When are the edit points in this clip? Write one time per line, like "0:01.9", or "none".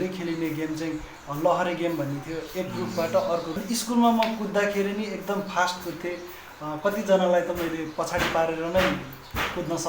0:03.6

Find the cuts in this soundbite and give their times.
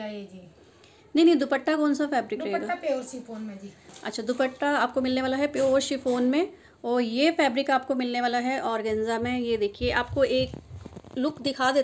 none

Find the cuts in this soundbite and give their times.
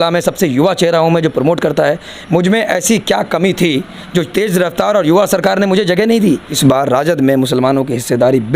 0:06.5

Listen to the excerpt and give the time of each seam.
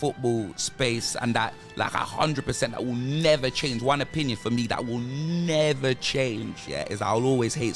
0:06.6

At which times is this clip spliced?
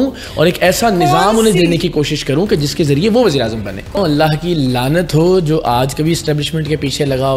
0:04.0

